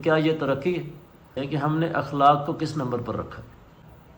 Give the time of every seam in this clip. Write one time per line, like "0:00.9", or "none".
0:01.3